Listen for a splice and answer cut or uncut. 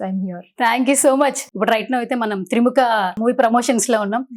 cut